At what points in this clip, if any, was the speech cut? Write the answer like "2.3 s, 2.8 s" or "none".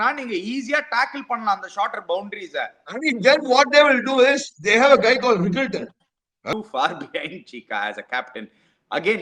6.5 s